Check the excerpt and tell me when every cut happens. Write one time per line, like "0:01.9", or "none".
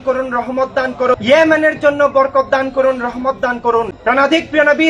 0:01.1
0:04.0

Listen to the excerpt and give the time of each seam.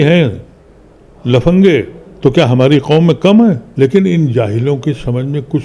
0:02.0
0:03.7

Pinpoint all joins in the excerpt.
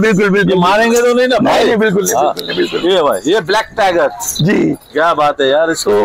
none

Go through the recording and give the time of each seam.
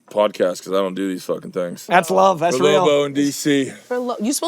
0:01.9

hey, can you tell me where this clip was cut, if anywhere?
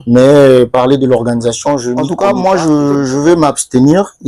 0:02.4

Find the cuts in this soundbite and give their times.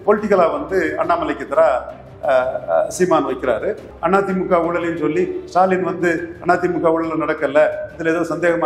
0:03.9

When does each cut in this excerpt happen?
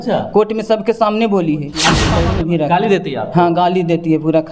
0:02.1

